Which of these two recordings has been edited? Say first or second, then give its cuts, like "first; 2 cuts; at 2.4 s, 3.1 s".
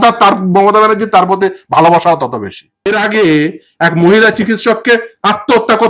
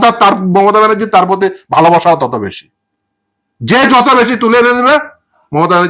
first; 1 cut; at 2.9 s